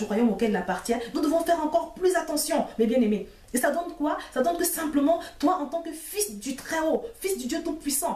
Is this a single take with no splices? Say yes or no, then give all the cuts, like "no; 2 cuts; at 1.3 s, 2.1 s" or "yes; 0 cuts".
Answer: yes; 0 cuts